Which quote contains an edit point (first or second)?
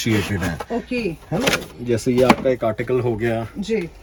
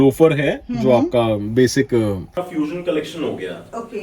second